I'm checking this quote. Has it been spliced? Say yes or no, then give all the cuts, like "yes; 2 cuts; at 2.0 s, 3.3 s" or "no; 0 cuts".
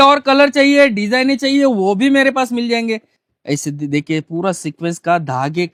no; 0 cuts